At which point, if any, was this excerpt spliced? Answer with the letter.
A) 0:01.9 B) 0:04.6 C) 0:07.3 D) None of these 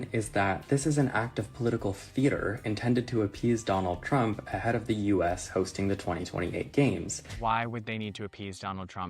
C